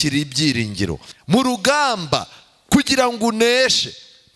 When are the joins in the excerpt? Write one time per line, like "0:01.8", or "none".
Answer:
0:01.1